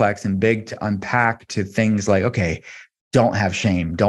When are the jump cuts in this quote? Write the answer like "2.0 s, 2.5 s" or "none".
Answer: none